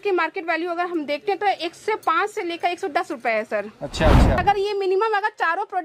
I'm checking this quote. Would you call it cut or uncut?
cut